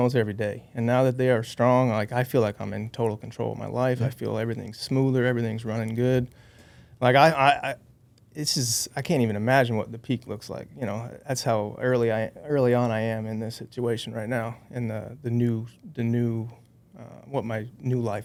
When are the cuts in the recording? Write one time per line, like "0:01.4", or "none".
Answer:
none